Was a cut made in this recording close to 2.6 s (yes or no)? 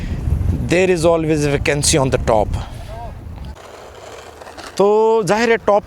no